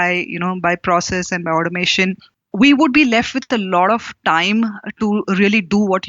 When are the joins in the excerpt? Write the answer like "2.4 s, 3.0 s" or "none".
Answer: 2.3 s